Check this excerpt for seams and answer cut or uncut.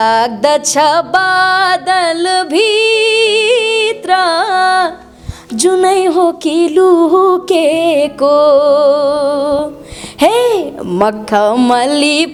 uncut